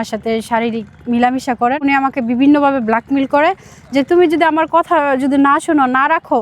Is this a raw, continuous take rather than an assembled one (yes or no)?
no